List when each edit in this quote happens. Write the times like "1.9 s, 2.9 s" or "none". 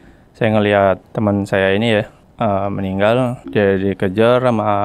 1.1 s, 2.2 s, 3.4 s